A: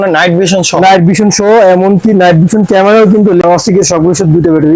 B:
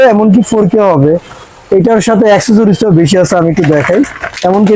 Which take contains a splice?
A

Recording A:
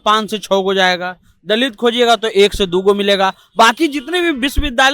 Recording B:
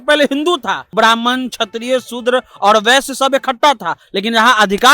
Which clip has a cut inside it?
B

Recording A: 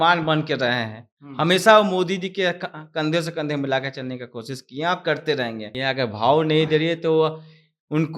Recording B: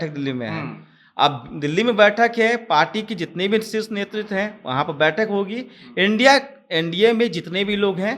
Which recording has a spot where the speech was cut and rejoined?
A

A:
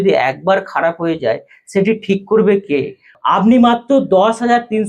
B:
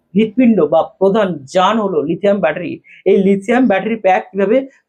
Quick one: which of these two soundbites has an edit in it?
A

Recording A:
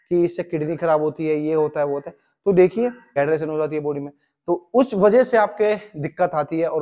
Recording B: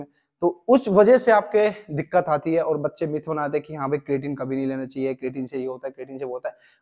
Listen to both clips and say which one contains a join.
A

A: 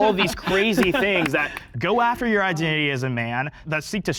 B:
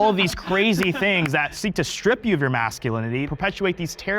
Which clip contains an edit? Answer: B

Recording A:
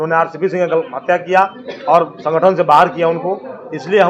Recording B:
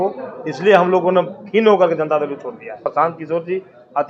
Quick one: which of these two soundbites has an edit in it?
B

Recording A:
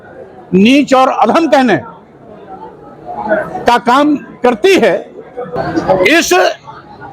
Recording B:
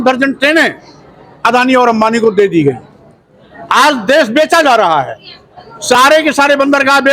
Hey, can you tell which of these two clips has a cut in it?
A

